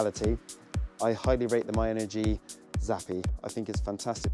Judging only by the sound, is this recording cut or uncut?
uncut